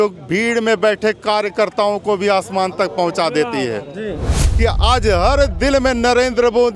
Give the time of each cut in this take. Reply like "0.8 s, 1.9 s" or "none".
4.4 s